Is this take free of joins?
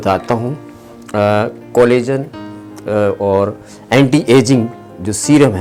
yes; 0 cuts

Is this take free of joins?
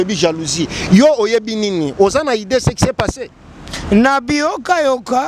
yes; 0 cuts

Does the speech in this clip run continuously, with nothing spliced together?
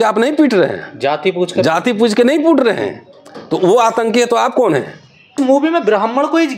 no; 1 cut; at 5.4 s

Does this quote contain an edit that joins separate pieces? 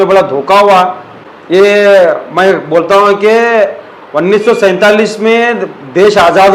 no; 0 cuts

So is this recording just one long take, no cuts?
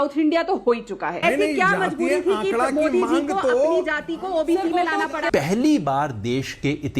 no; 2 cuts; at 1.1 s, 5.3 s

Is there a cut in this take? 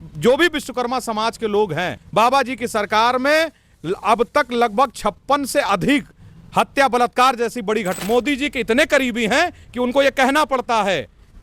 yes; 2 cuts; at 2.0 s, 8.0 s

